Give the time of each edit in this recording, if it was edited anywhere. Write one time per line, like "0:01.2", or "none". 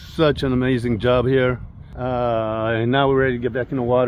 none

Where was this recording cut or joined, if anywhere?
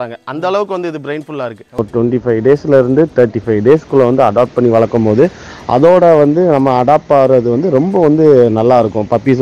0:01.9

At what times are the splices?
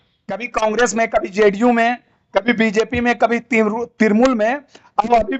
none

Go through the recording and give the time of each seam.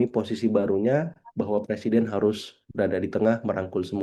none

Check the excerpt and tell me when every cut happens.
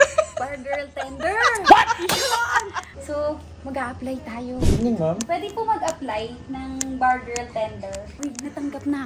0:04.5
0:08.1

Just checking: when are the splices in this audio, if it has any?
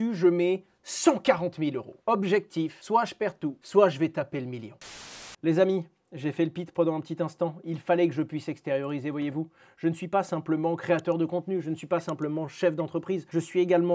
0:04.9

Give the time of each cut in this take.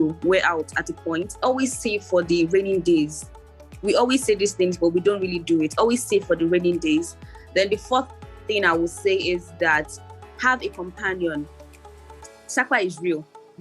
0:01.3

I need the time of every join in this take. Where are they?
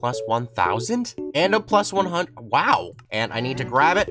0:01.2
0:03.0

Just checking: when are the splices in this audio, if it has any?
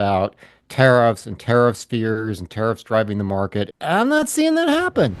0:03.7

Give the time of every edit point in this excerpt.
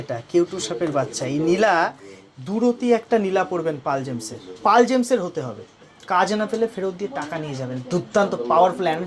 none

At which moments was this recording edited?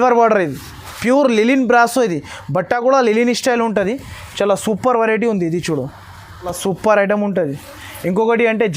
0:00.9
0:06.5

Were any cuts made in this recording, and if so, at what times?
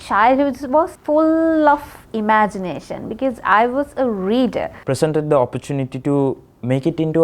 0:01.0
0:04.8

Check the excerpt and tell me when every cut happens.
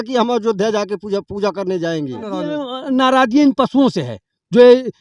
0:02.5

